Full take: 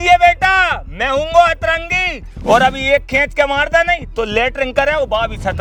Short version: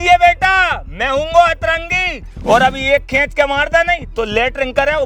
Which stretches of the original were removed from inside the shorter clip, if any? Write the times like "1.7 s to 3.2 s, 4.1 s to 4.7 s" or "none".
none

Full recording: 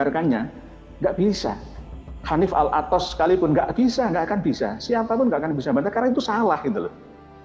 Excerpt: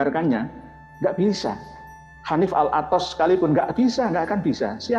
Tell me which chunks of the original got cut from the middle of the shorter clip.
none

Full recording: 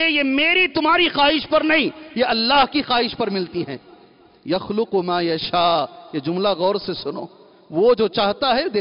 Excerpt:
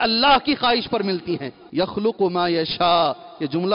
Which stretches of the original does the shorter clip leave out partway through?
3.8 s to 4.3 s

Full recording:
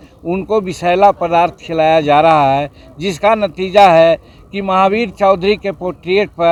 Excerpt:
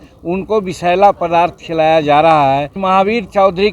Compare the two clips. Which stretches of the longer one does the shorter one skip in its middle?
2.7 s to 4.6 s

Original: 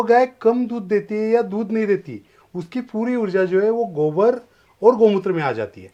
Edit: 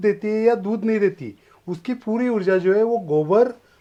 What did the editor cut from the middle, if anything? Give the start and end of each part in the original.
none

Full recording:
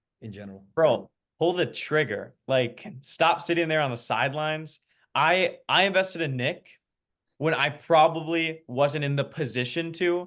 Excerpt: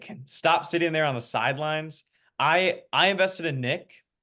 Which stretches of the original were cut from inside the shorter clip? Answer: none

